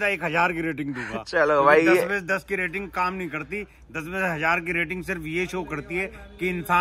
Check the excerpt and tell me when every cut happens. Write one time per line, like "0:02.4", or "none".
none